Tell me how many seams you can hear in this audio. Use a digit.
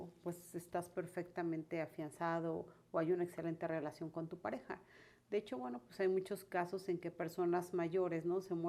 0